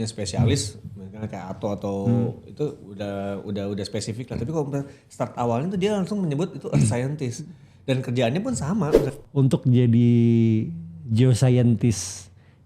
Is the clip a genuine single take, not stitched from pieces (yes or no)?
no